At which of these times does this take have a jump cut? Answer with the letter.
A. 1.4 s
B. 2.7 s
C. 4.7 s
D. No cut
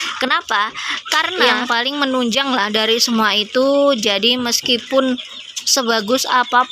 A